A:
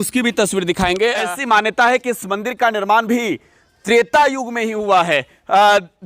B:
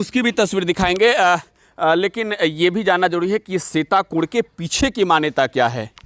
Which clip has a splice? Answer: A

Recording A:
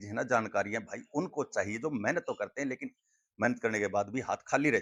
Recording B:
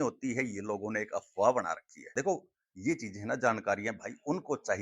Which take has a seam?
B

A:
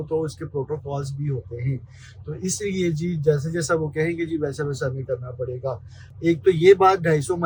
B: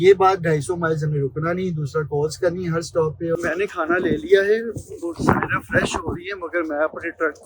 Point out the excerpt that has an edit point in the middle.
B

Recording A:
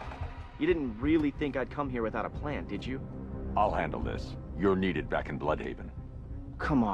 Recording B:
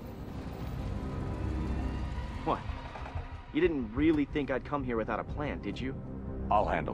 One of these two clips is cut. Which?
A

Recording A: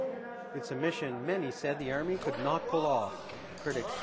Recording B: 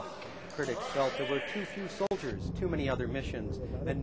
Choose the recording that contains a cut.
B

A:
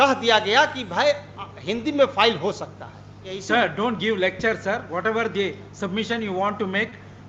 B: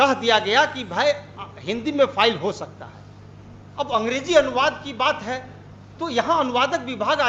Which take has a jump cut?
A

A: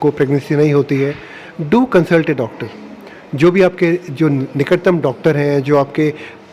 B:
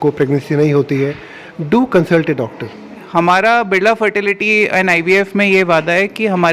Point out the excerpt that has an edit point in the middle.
B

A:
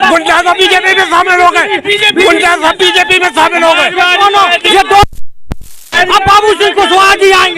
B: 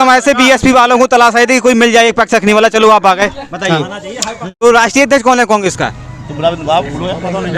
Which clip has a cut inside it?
B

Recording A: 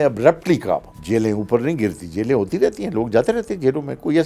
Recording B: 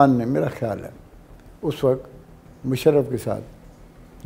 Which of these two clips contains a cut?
A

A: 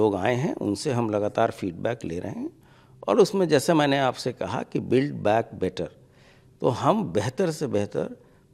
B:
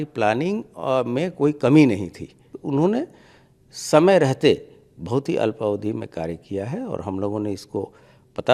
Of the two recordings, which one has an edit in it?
B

